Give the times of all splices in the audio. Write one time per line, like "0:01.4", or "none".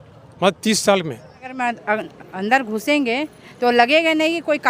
0:01.5